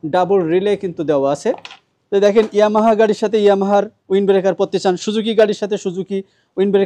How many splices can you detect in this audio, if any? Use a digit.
1